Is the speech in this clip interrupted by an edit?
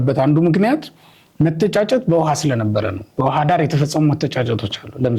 no; 0 cuts

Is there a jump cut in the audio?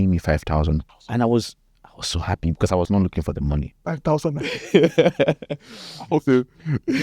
yes; 3 cuts; at 1.0 s, 2.9 s, 3.9 s

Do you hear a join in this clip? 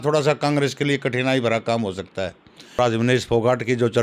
yes; 1 cut; at 2.8 s

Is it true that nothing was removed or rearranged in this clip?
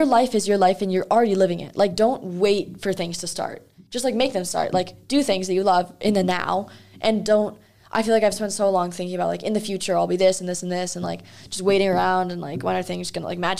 yes; 0 cuts

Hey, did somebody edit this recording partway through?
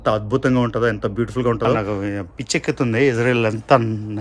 yes; 1 cut; at 1.8 s

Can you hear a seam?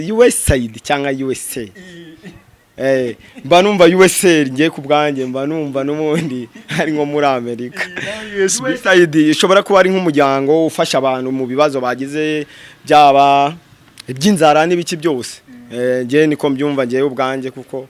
no; 0 cuts

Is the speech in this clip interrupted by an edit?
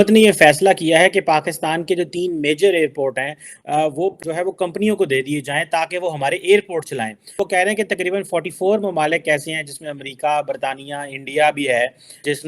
yes; 2 cuts; at 4.2 s, 7.2 s

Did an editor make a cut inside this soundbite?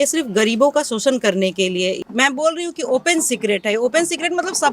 yes; 1 cut; at 2.0 s

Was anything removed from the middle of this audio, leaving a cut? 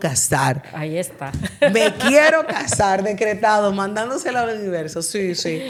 no; 0 cuts

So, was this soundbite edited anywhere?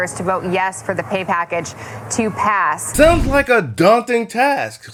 no; 0 cuts

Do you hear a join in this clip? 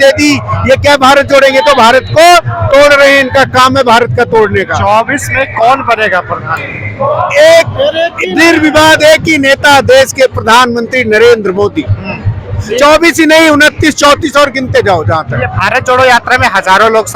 no; 0 cuts

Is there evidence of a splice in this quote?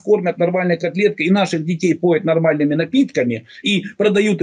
no; 0 cuts

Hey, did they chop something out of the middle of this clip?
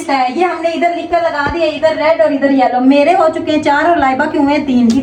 no; 0 cuts

